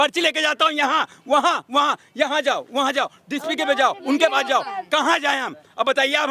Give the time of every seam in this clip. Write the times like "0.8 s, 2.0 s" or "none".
none